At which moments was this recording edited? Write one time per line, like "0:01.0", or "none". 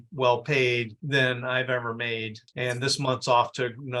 0:02.5